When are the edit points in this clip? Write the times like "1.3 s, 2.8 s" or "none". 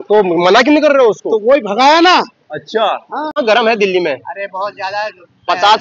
3.3 s